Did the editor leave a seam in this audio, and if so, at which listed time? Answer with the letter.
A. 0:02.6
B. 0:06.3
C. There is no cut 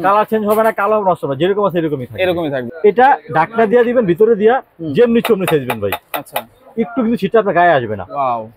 A